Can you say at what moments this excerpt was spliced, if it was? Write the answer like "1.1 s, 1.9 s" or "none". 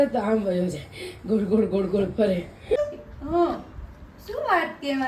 2.8 s